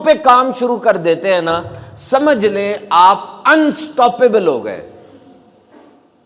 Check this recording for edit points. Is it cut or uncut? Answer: uncut